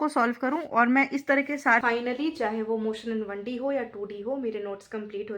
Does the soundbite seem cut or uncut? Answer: cut